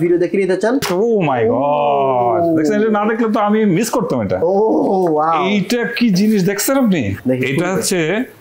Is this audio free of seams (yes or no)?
no